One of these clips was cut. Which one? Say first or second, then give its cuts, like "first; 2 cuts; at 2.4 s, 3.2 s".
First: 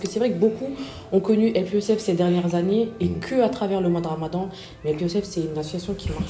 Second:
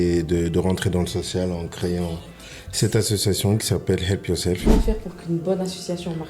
second; 1 cut; at 4.7 s